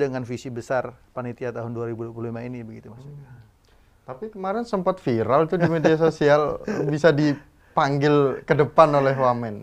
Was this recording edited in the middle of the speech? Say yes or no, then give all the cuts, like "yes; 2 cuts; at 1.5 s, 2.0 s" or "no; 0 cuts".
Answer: no; 0 cuts